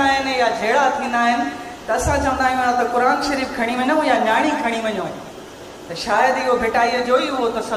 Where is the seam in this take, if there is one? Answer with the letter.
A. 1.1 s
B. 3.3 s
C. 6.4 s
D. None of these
D